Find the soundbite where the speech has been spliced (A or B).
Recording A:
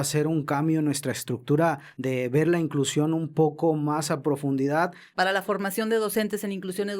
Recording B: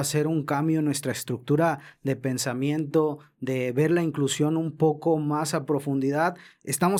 A